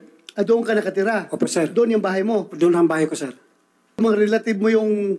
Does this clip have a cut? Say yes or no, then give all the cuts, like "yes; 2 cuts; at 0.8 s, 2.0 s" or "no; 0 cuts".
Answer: yes; 1 cut; at 4.0 s